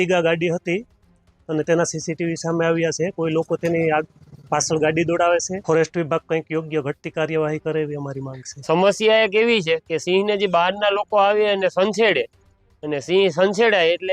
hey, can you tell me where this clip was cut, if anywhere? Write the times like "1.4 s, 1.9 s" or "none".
5.5 s, 8.6 s